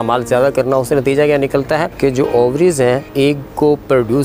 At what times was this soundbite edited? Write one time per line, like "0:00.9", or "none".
0:01.9
0:03.1